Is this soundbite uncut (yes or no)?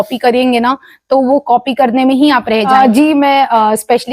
no